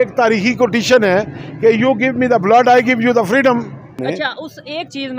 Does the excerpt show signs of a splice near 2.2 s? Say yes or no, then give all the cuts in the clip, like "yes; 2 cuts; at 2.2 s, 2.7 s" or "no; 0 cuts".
no; 1 cut; at 3.9 s